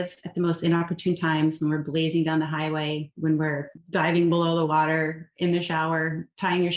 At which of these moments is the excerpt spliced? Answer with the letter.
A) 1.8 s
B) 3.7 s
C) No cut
B